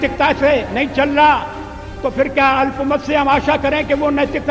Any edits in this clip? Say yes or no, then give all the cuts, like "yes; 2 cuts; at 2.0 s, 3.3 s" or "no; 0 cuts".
no; 0 cuts